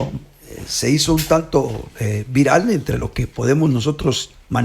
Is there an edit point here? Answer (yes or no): no